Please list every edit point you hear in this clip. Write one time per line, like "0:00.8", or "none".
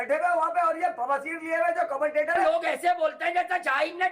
0:02.5